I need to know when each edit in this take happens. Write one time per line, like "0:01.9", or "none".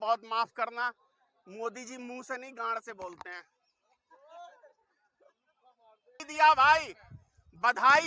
0:06.3

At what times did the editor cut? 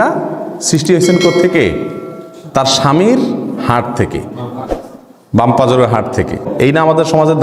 0:06.5

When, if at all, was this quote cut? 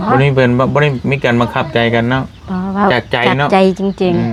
none

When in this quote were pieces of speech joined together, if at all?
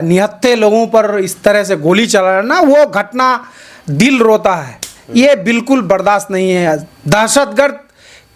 none

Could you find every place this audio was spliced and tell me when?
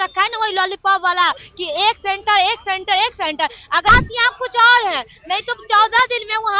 0:03.9

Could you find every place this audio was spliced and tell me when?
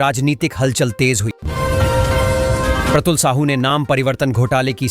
0:01.4
0:02.9

